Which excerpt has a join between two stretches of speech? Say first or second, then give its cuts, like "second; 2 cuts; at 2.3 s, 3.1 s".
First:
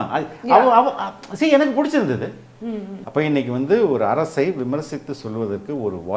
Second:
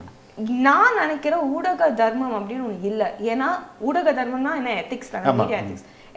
first; 1 cut; at 2.9 s